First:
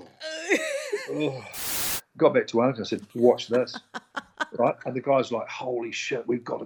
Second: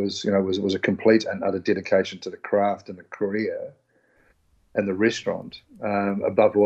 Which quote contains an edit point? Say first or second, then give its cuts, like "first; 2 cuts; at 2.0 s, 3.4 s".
first; 1 cut; at 1.5 s